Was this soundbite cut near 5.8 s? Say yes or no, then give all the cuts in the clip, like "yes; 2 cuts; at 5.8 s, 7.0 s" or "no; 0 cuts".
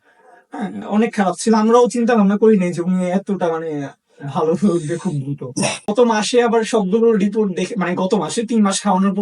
yes; 1 cut; at 5.8 s